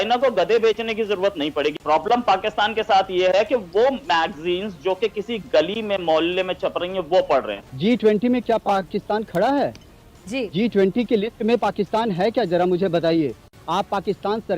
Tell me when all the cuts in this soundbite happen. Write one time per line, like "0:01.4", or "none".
0:01.7
0:07.6
0:13.5